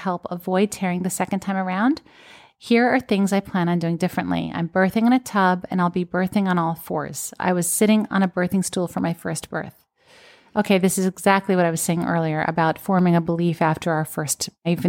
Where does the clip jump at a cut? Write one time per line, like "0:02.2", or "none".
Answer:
none